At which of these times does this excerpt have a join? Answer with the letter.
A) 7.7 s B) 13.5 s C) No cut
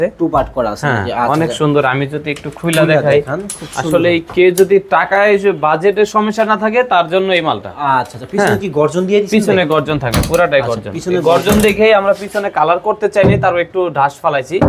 C